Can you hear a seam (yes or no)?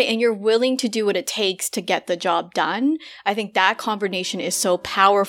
no